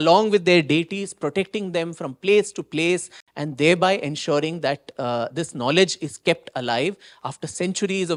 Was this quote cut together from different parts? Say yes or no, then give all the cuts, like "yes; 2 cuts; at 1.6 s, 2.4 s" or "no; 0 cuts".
no; 0 cuts